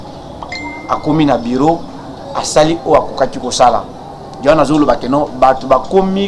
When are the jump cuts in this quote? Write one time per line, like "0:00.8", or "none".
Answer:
none